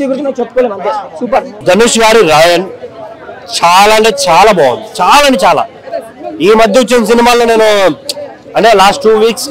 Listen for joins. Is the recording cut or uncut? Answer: uncut